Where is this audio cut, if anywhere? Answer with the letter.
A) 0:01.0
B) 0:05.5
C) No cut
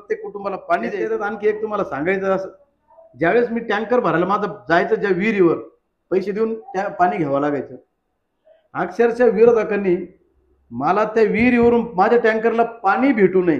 A